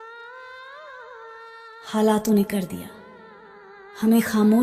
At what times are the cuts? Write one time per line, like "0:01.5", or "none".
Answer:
0:01.3